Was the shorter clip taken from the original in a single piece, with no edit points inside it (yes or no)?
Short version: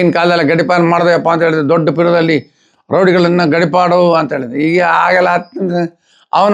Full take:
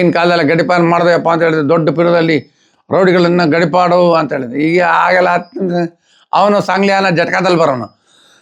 yes